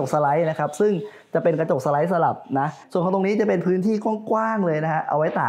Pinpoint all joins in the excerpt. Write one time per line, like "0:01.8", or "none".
0:02.8